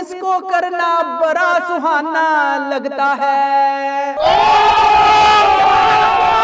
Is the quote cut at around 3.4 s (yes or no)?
no